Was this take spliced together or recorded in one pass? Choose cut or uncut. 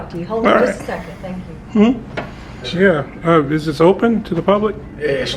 cut